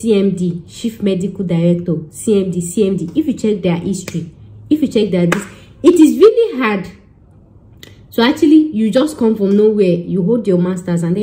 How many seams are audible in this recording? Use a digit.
0